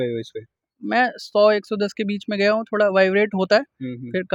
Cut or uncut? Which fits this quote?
uncut